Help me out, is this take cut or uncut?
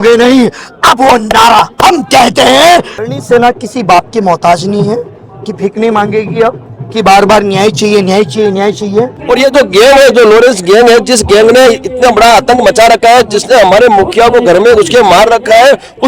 cut